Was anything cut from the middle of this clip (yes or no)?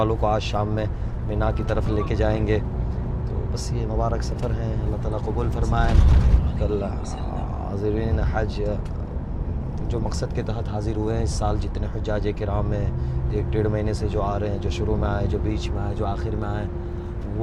no